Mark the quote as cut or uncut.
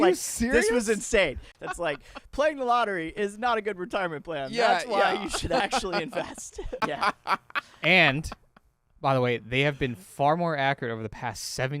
cut